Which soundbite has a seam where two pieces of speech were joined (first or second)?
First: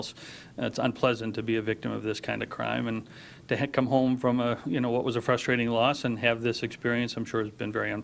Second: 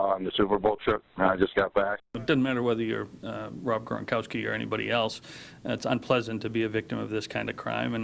second